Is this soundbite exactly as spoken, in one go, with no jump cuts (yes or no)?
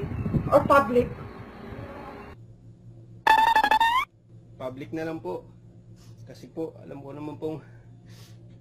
no